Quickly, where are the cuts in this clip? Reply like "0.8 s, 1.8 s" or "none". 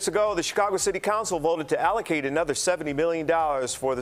none